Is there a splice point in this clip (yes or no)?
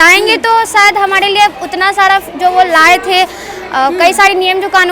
no